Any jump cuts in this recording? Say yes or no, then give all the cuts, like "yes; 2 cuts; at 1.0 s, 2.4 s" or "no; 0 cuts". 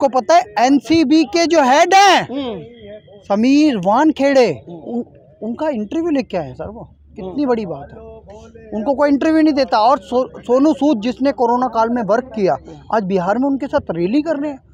no; 0 cuts